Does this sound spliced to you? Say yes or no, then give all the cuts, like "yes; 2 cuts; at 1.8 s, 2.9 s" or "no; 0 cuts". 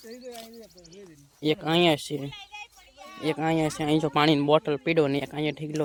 no; 0 cuts